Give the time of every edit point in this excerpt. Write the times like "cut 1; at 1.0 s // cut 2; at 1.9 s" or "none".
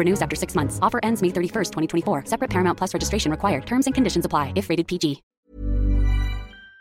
cut 1; at 5.3 s